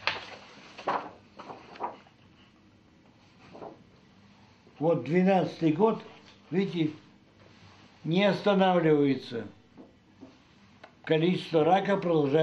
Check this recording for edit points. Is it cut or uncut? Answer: uncut